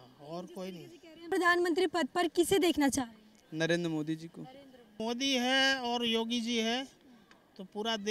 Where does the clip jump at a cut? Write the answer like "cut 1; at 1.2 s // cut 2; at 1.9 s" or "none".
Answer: cut 1; at 1.2 s // cut 2; at 5.0 s